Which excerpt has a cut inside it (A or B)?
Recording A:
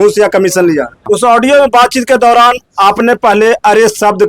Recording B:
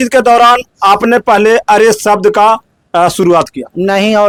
A